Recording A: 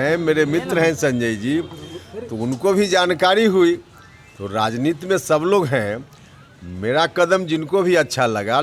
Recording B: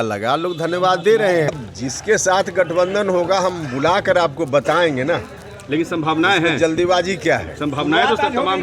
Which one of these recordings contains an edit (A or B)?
B